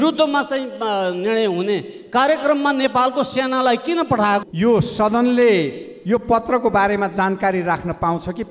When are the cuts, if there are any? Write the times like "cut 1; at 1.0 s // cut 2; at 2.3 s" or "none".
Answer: cut 1; at 4.4 s

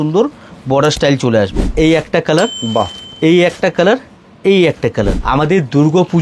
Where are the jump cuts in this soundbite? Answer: cut 1; at 1.7 s // cut 2; at 5.2 s

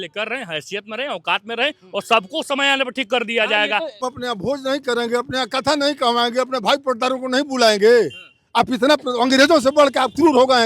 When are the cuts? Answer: cut 1; at 4.0 s

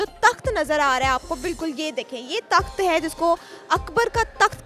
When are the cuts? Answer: none

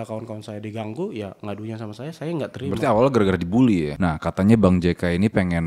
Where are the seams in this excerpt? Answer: cut 1; at 3.9 s

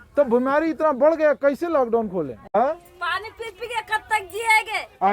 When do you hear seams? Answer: cut 1; at 2.4 s

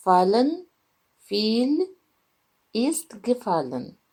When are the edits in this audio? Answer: none

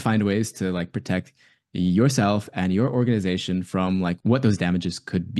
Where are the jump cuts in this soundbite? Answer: cut 1; at 4.2 s

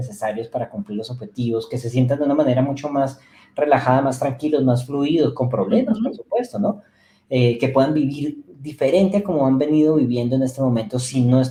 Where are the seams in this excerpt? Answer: none

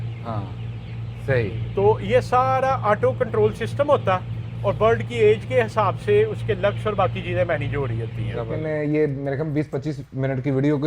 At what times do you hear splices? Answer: cut 1; at 8.6 s

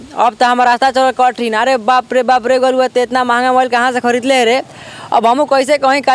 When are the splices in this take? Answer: none

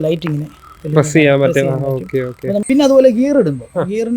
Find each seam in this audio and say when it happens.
cut 1; at 2.6 s

